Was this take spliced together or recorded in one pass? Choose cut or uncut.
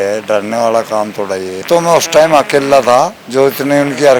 cut